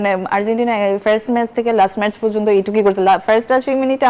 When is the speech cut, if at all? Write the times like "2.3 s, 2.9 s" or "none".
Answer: none